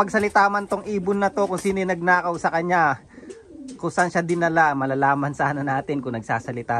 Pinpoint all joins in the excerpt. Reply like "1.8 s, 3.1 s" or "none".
none